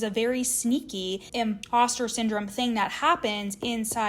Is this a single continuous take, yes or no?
no